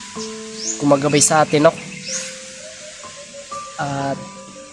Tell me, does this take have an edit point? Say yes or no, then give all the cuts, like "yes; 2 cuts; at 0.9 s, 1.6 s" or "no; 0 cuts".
no; 0 cuts